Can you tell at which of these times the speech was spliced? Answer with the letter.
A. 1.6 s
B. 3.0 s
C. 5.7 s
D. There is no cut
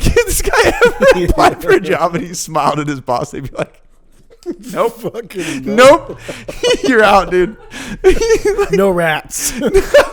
D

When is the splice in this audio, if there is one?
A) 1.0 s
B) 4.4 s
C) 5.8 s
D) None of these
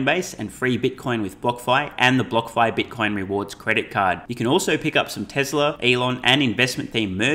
C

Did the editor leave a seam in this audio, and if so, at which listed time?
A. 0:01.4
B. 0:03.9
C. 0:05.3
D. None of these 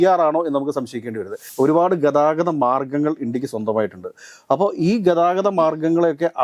A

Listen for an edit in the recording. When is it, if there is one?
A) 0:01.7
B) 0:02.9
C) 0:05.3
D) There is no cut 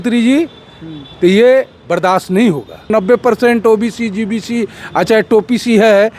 B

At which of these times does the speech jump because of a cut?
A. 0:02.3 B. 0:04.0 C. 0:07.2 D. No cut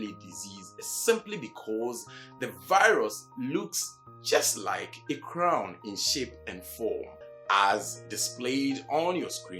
C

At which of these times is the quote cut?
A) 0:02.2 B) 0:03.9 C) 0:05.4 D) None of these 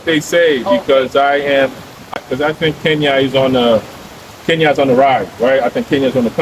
A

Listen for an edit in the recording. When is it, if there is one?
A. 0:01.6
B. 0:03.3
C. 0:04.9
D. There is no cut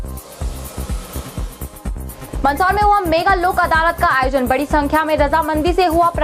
A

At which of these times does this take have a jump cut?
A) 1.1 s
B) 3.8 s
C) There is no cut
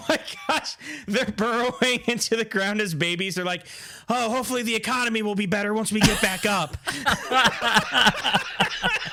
C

